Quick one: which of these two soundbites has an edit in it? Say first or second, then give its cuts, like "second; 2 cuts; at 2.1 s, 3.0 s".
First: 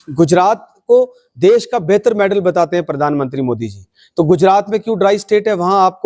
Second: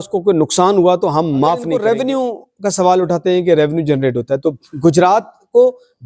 second; 1 cut; at 1.7 s